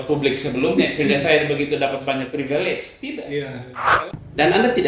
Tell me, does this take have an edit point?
yes; 1 cut; at 3.9 s

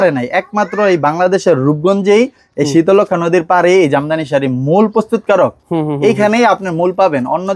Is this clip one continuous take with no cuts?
yes; 0 cuts

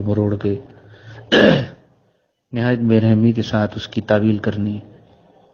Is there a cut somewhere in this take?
no; 0 cuts

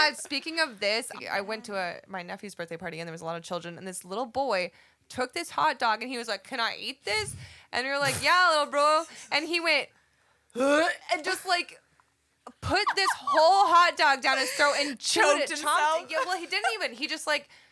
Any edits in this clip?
yes; 1 cut; at 1.2 s

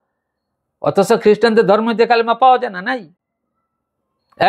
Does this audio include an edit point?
no; 0 cuts

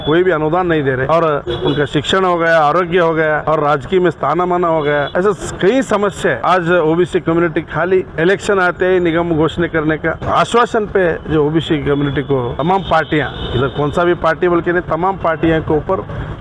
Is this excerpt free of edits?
no; 7 cuts; at 1.1 s, 3.4 s, 5.1 s, 6.4 s, 8.1 s, 10.2 s, 12.5 s

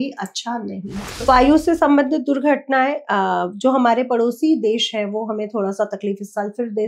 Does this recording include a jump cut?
yes; 1 cut; at 1.2 s

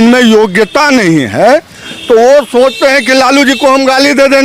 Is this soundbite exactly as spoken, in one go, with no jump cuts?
yes; 0 cuts

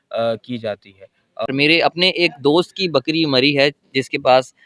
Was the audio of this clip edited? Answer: yes; 1 cut; at 1.5 s

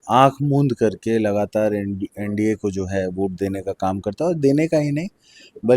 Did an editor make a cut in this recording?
no; 0 cuts

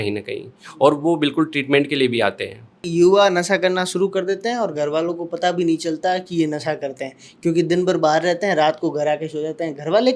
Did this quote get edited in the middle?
yes; 1 cut; at 2.8 s

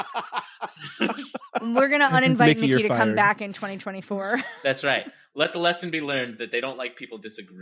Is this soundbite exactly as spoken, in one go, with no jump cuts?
yes; 0 cuts

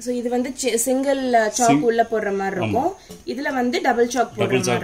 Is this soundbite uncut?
yes; 0 cuts

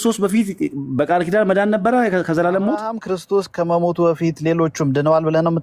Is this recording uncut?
no; 1 cut; at 2.9 s

